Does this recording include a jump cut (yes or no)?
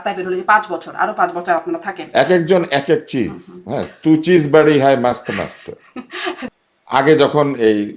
yes